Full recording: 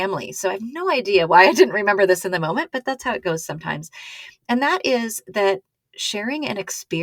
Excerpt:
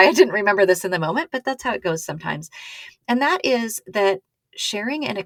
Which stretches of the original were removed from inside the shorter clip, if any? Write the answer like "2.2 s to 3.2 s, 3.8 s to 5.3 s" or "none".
none

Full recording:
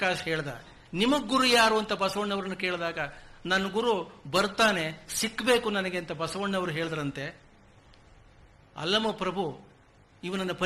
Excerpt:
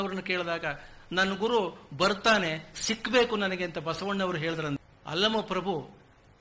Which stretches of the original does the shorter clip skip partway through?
7.2 s to 8.5 s

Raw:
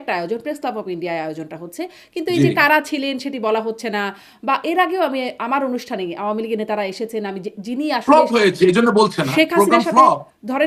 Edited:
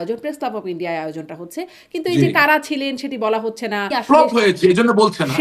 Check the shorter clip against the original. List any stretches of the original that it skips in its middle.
4.1 s to 7.9 s

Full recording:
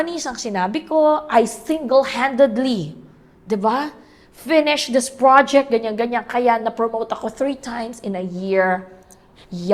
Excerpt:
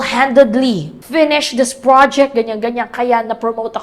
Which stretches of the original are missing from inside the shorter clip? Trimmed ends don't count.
3.0 s to 4.3 s

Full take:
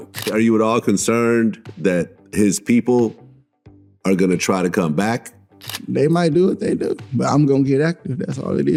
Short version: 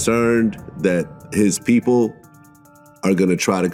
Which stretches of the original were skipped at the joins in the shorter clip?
none

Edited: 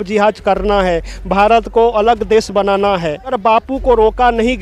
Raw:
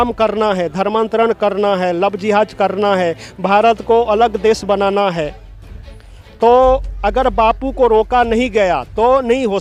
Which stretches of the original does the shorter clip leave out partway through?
5.5 s to 7.3 s

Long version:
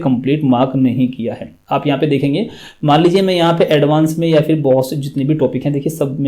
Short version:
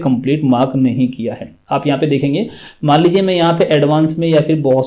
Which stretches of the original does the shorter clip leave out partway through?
none

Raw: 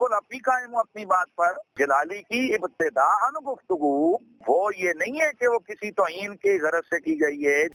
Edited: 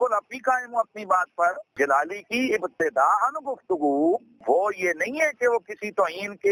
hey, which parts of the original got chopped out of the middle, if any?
none

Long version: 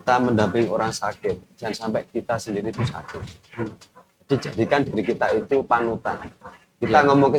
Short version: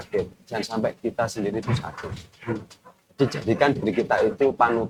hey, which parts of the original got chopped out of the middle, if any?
none

